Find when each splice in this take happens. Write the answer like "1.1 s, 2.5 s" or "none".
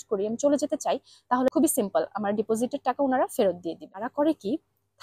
1.5 s, 4.1 s